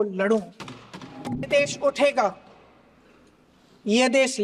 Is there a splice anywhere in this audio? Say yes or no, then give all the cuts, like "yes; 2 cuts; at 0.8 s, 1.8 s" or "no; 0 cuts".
yes; 1 cut; at 1.5 s